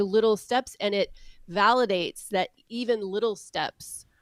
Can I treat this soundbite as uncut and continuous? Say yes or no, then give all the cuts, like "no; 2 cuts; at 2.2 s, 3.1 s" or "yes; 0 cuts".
yes; 0 cuts